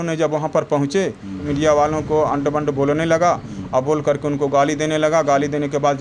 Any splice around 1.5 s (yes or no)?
yes